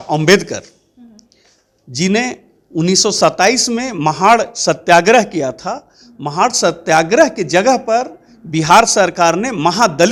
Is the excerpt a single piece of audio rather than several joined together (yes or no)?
yes